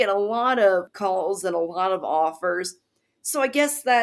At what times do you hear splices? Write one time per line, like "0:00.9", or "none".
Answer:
0:00.9